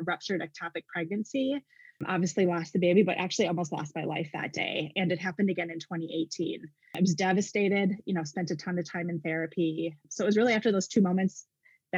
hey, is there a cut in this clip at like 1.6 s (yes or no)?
no